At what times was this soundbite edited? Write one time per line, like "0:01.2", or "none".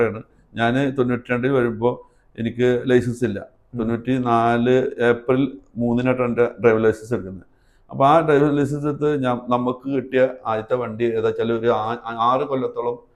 none

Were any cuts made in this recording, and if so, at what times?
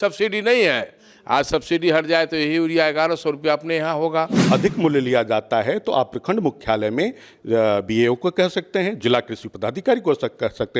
0:04.4

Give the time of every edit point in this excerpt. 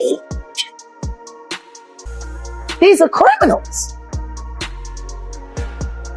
0:03.7

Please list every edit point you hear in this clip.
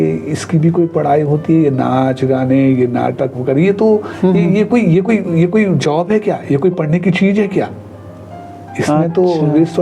none

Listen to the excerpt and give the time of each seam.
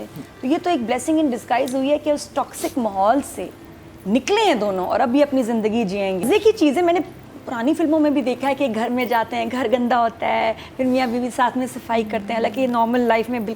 0:06.2

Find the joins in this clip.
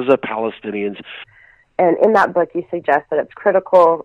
0:01.3

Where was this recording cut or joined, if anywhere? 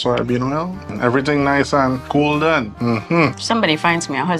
0:00.9
0:02.0
0:03.3

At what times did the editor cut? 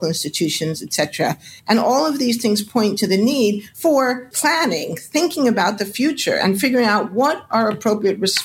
0:04.3

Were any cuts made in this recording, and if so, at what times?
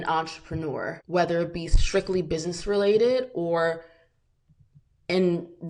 0:01.0

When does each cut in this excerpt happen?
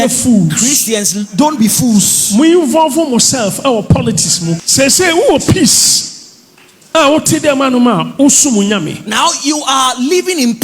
0:04.6

